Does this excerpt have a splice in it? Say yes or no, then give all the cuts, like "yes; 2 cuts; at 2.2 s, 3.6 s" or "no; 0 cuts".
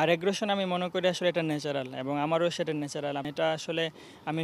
yes; 1 cut; at 3.3 s